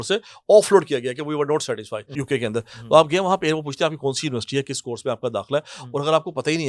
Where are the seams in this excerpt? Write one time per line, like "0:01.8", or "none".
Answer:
0:02.2